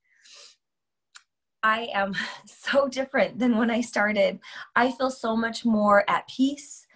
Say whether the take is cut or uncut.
uncut